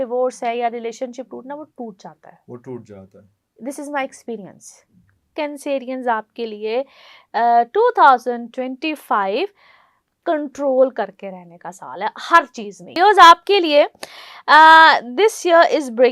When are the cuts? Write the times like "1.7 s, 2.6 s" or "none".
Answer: 5.3 s, 12.9 s